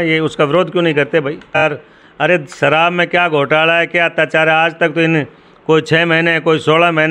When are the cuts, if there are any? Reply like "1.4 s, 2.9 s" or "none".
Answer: 1.6 s